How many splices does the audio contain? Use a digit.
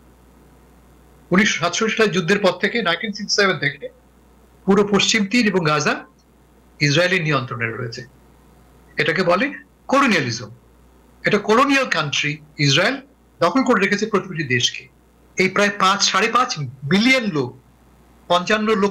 1